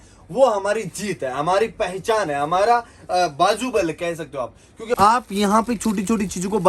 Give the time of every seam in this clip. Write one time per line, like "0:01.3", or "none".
0:05.0